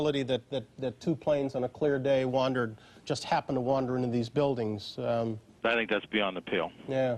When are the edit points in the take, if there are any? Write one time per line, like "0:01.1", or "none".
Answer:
none

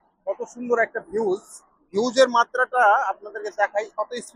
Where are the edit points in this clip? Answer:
none

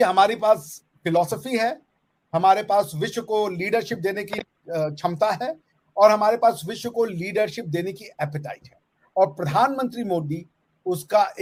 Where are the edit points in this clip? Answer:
none

